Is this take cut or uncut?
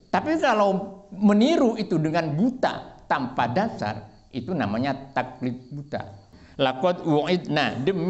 cut